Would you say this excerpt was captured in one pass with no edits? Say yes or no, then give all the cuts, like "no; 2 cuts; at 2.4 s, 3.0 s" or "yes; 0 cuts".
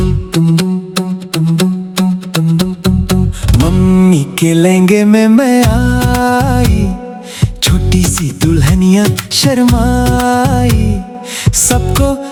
yes; 0 cuts